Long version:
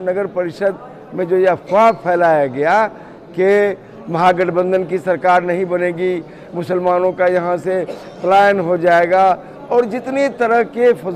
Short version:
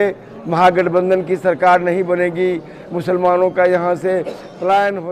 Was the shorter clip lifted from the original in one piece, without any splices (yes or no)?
yes